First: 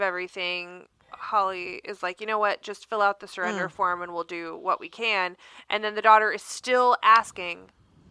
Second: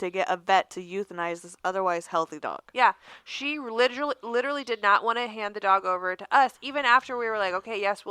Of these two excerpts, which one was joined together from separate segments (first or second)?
first